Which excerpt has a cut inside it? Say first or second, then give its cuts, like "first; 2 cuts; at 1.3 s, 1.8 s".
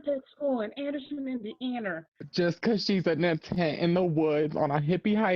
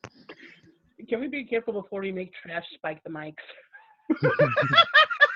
first; 1 cut; at 2.1 s